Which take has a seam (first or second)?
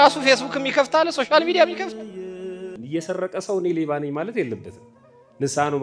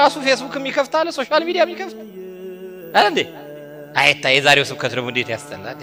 first